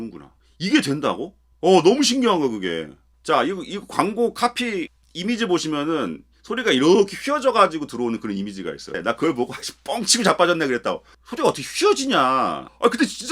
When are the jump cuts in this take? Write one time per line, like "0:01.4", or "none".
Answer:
0:05.0
0:08.9